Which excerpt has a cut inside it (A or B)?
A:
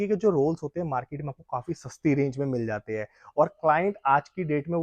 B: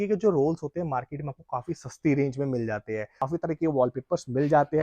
B